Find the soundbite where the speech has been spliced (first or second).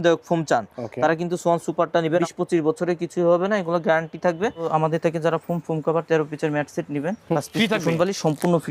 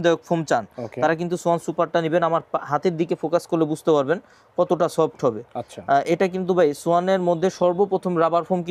first